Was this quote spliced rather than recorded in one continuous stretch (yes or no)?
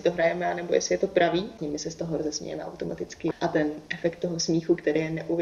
yes